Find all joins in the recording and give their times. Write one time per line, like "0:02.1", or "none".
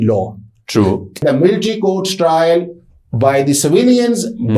0:01.2